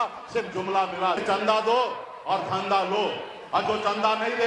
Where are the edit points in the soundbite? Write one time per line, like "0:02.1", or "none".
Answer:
0:01.2